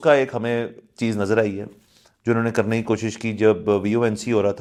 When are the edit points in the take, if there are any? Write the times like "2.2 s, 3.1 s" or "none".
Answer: none

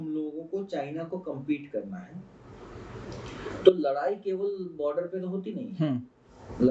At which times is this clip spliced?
none

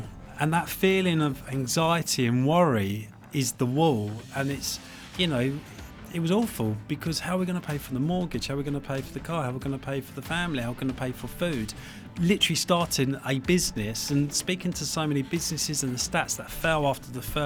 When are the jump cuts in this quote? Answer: none

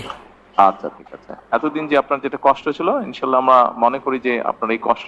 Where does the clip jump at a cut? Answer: 1.4 s

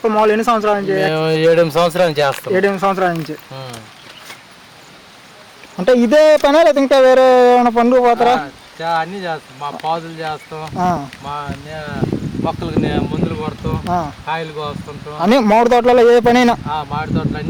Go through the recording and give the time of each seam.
none

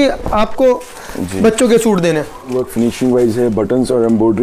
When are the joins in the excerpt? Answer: 2.6 s

